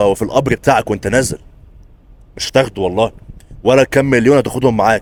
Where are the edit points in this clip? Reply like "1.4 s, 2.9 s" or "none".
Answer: none